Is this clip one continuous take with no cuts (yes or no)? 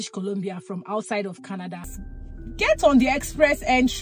no